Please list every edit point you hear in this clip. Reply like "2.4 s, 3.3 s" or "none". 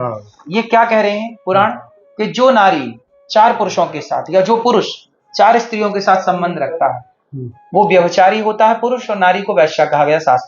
none